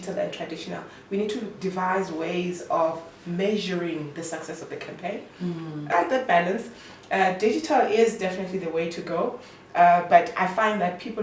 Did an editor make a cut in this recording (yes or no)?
yes